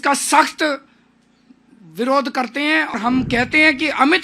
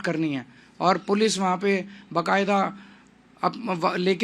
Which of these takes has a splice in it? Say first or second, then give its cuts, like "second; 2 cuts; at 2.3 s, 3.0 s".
first; 1 cut; at 2.9 s